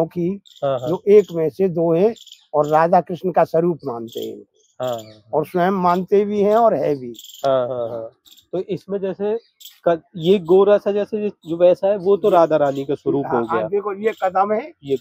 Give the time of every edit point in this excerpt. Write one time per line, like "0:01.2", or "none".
none